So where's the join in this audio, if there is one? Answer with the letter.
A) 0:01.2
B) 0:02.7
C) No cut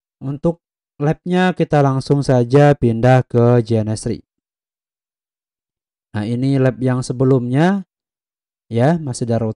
C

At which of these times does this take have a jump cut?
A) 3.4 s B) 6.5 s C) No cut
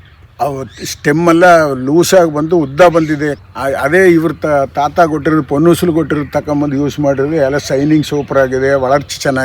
A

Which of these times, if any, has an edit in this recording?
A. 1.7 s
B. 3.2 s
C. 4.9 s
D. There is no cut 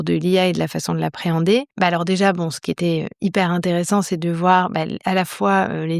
A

